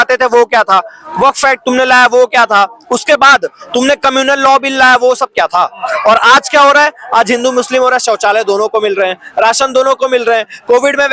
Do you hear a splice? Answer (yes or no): no